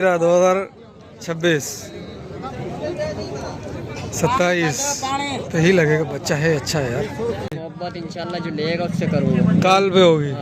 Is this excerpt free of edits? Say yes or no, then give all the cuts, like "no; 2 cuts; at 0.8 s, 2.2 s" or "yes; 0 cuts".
no; 1 cut; at 7.6 s